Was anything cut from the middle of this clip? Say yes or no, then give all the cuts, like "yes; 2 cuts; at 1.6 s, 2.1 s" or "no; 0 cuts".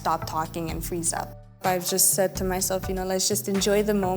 yes; 1 cut; at 1.6 s